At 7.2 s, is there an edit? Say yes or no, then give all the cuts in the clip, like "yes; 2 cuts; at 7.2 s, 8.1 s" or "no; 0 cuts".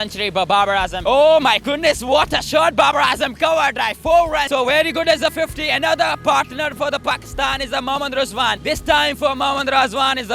no; 3 cuts; at 1.0 s, 4.5 s, 8.5 s